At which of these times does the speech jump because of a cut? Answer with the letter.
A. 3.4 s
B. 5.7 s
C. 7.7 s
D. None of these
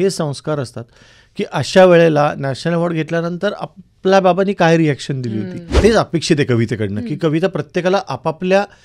B